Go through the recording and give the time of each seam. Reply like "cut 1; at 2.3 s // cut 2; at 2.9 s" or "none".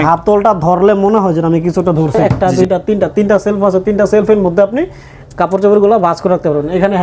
cut 1; at 2.3 s